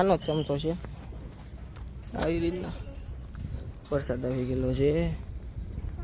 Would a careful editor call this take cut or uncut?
uncut